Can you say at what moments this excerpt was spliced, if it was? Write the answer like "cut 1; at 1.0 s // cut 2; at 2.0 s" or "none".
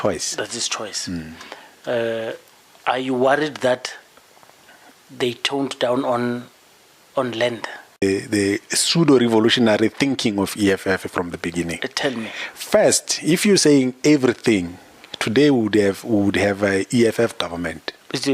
cut 1; at 8.0 s

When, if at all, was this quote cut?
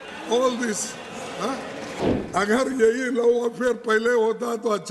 cut 1; at 2.0 s

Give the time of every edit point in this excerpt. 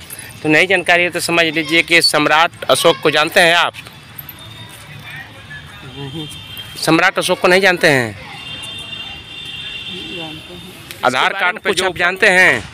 cut 1; at 11.7 s

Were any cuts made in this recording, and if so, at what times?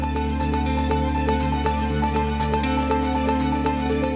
none

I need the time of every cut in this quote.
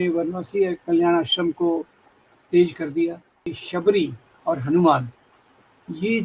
cut 1; at 3.6 s

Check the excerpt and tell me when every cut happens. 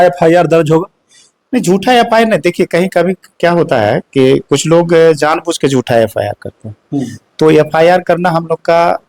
none

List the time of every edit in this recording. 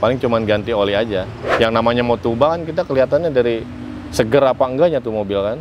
cut 1; at 1.4 s

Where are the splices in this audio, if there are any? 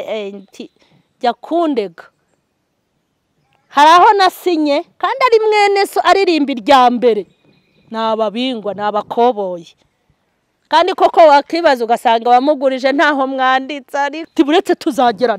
cut 1; at 14.2 s

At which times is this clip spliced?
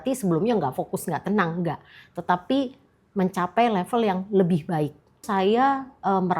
cut 1; at 5.2 s

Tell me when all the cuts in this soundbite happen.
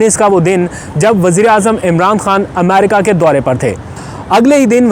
cut 1; at 3.9 s

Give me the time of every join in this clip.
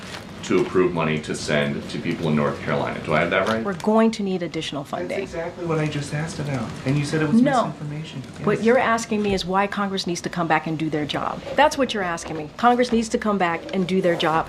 cut 1; at 3.7 s

